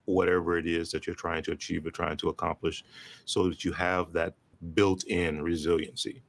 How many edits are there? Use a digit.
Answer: 1